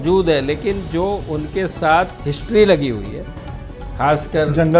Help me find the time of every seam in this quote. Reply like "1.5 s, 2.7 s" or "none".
2.3 s